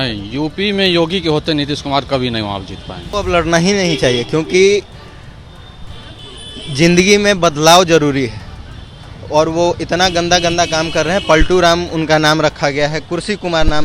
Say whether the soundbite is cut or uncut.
cut